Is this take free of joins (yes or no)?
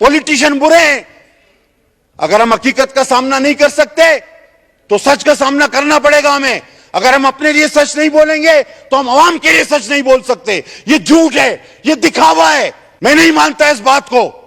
no